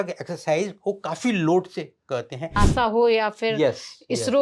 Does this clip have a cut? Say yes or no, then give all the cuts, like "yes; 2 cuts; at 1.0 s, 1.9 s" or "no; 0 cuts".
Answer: yes; 1 cut; at 2.5 s